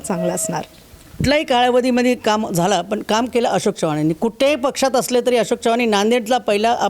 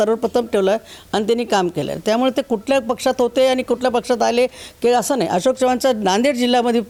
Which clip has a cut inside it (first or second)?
first